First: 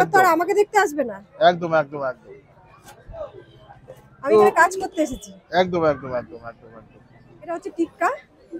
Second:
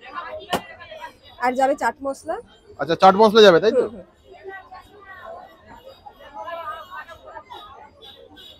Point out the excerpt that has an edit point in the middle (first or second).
first